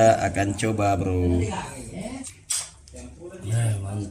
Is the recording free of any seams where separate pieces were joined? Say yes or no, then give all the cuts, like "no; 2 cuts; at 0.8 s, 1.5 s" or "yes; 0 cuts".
no; 1 cut; at 2.4 s